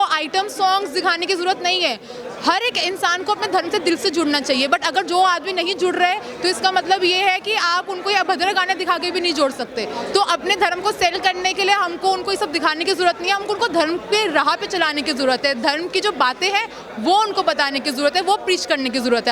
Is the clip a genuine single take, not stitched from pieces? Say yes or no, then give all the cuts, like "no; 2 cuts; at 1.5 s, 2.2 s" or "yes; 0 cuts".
yes; 0 cuts